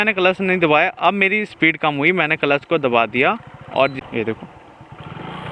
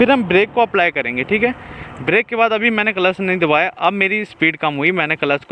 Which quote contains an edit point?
first; 1 cut; at 4.0 s

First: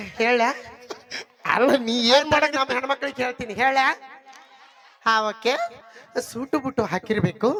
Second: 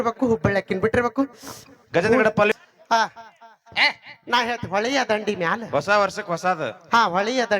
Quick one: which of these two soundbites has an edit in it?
second; 1 cut; at 2.5 s

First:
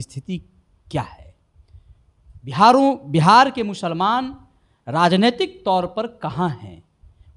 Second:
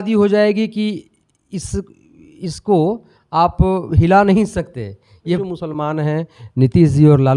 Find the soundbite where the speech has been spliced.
second; 1 cut; at 5.4 s

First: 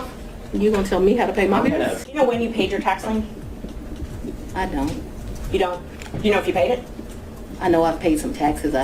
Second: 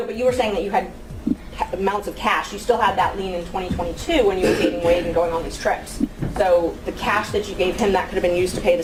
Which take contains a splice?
first; 1 cut; at 2.1 s

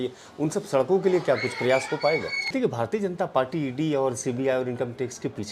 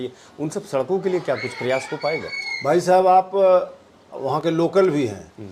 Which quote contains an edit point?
first; 1 cut; at 2.5 s

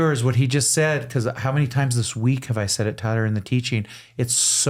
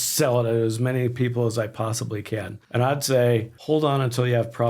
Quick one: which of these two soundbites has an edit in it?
second; 2 cuts; at 2.6 s, 3.5 s

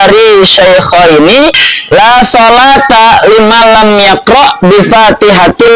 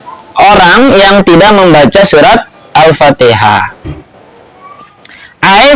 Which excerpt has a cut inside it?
first; 1 cut; at 1.7 s

